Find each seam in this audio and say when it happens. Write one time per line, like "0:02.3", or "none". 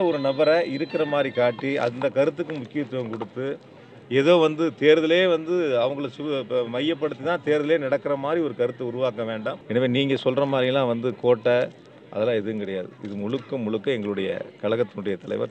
0:09.6